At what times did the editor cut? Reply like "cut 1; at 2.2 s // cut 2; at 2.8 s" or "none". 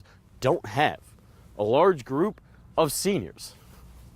none